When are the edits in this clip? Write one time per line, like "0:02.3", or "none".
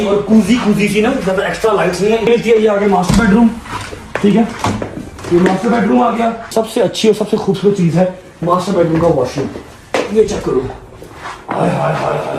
0:02.3
0:06.5